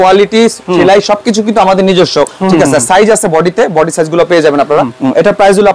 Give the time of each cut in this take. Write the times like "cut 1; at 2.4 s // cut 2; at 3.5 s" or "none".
cut 1; at 2.5 s // cut 2; at 4.9 s